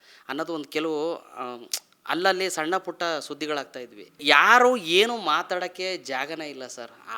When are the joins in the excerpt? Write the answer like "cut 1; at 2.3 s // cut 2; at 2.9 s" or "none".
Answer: cut 1; at 4.2 s